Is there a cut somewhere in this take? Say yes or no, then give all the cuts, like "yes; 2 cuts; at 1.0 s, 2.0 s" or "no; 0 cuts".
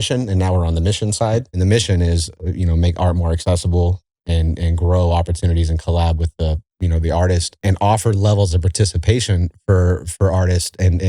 yes; 2 cuts; at 1.6 s, 7.5 s